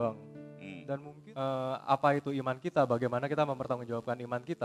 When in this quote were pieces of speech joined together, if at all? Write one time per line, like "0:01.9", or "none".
0:01.1

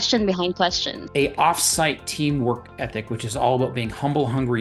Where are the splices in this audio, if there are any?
0:01.0

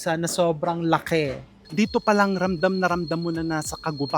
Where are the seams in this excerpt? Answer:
0:01.6

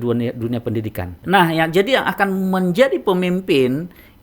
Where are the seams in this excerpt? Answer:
0:01.1

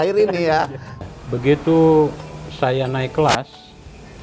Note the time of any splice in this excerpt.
0:01.0

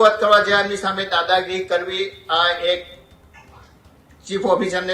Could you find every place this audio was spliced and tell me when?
none

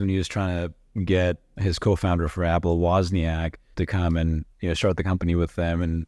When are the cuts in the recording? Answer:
0:01.5
0:03.6

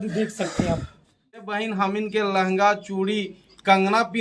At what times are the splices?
0:01.4

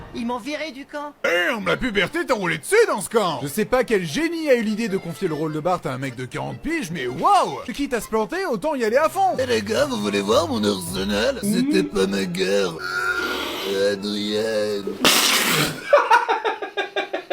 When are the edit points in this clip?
0:01.2
0:07.7
0:09.4
0:12.9

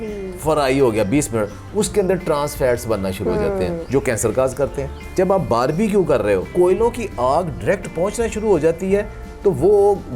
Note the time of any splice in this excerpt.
0:05.0
0:06.5

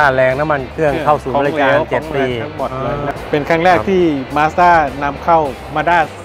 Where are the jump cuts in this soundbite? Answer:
0:03.1

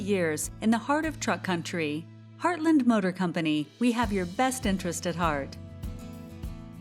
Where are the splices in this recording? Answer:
0:05.5

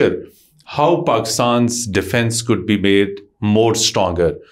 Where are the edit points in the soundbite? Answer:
none

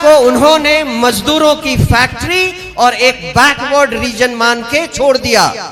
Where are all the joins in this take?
none

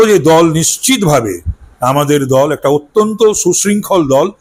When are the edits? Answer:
none

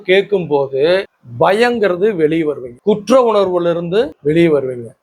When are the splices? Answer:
0:01.2
0:02.7
0:04.2

